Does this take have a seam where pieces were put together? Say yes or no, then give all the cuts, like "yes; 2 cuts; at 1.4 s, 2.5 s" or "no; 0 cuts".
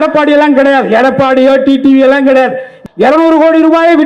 yes; 1 cut; at 2.7 s